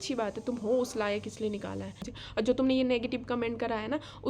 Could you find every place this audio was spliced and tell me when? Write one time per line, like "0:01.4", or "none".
0:02.1